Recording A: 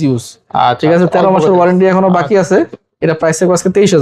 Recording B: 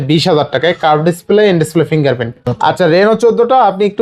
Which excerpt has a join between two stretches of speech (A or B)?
B